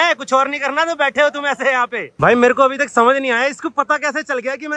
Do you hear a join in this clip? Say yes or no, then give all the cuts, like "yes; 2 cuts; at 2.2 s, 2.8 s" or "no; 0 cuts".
no; 0 cuts